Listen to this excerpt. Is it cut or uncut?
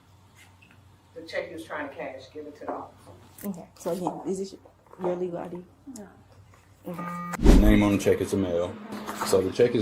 cut